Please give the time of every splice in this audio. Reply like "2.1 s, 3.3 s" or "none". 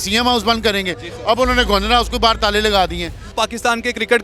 3.3 s